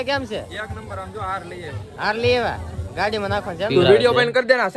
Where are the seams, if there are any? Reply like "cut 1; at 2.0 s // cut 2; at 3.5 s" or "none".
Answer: cut 1; at 3.7 s